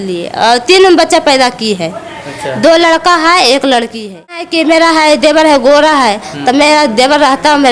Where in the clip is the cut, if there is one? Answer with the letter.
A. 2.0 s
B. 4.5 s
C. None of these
B